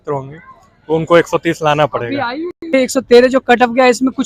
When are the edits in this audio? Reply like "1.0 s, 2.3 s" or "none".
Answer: 2.6 s